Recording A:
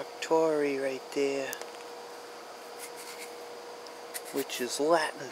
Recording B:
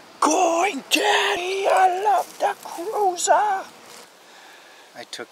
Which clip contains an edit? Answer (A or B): B